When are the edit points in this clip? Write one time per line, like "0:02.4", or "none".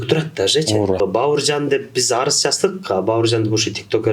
0:01.0